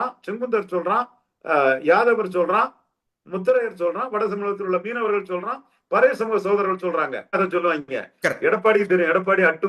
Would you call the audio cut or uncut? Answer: cut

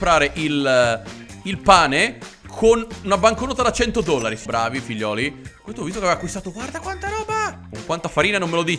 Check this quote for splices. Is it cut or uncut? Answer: cut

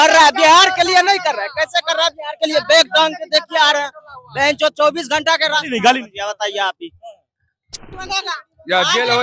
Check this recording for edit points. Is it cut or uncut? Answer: cut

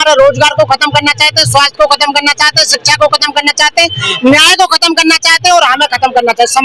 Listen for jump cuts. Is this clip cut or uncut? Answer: uncut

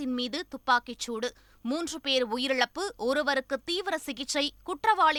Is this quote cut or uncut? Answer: uncut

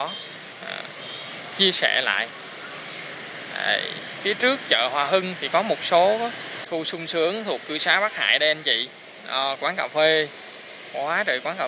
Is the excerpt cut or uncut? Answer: cut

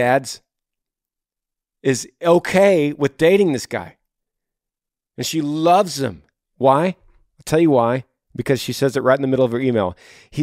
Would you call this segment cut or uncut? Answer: uncut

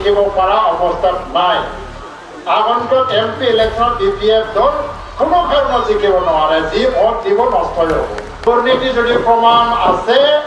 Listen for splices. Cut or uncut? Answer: cut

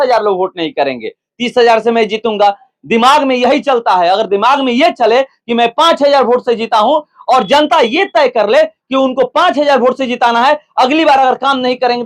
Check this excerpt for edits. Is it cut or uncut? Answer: uncut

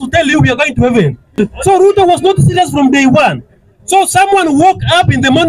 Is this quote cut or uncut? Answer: cut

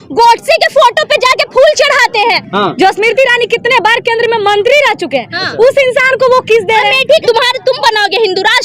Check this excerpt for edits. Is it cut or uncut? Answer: cut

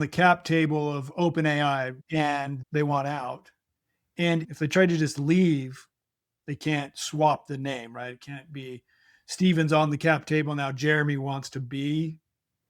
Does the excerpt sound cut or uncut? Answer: cut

